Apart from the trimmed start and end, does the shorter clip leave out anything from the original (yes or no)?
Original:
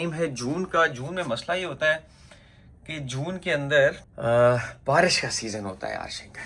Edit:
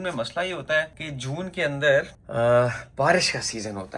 yes